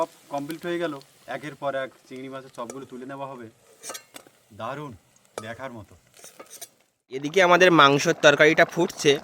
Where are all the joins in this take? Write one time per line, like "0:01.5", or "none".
0:07.2